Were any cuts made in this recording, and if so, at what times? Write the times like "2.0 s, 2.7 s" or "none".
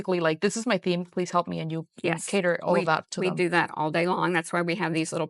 none